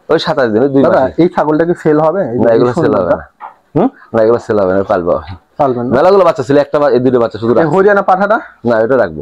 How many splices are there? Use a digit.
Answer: 0